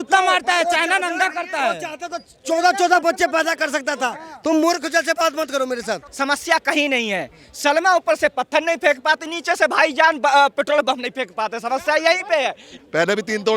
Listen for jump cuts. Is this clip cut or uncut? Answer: cut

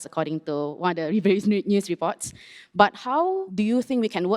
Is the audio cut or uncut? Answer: cut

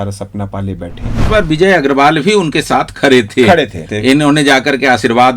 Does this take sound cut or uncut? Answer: cut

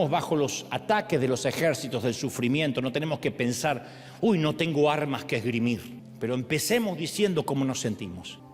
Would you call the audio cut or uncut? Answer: cut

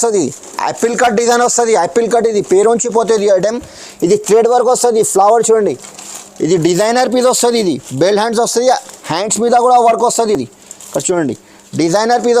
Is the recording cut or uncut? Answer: uncut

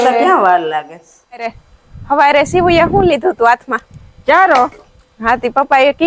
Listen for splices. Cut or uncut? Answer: cut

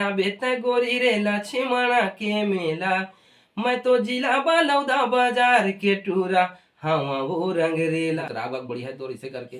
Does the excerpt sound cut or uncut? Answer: cut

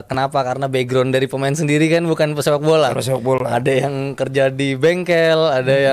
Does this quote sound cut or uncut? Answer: uncut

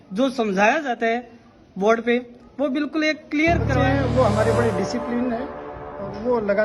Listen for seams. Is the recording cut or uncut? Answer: cut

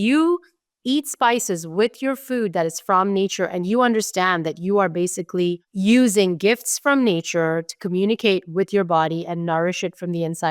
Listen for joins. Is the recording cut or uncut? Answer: cut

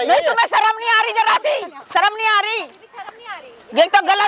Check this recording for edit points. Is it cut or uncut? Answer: uncut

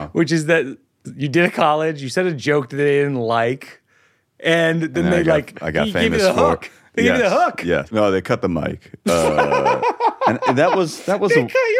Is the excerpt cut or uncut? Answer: cut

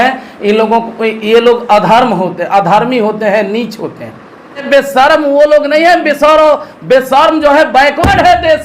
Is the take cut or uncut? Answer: cut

